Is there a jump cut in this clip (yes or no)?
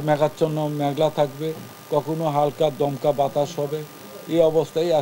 no